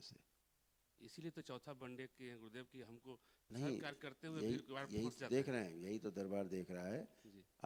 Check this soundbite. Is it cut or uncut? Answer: uncut